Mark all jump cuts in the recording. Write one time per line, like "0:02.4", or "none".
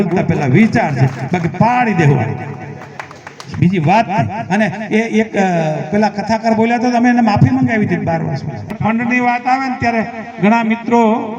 0:08.7